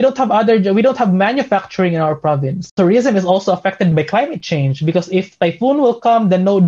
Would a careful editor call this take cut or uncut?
cut